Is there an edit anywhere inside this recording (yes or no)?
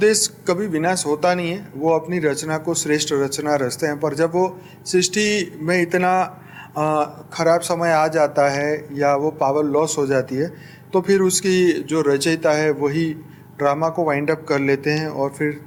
no